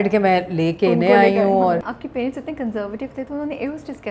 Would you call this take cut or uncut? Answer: cut